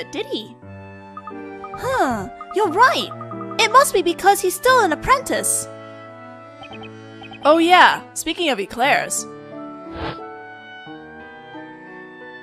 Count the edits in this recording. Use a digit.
1